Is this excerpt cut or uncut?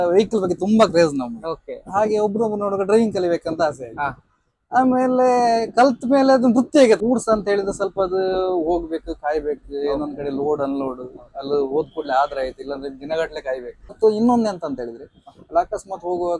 cut